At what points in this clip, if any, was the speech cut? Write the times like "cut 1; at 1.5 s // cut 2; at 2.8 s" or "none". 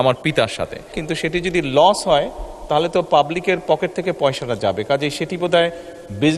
cut 1; at 0.9 s